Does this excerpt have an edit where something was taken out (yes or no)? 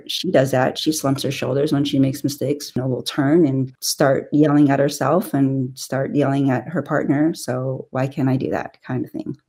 yes